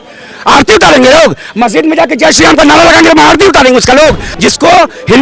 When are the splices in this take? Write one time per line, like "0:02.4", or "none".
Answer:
0:04.3

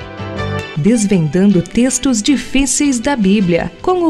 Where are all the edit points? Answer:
none

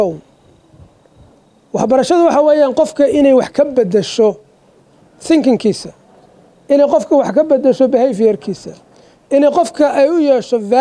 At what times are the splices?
none

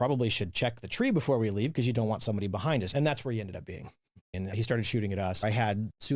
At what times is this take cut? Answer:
0:02.9
0:04.4
0:05.4

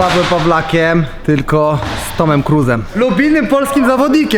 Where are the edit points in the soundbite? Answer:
0:01.1
0:02.9

